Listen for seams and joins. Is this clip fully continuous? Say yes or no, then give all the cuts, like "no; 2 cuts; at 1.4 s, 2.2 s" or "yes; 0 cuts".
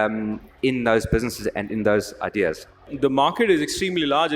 no; 1 cut; at 2.9 s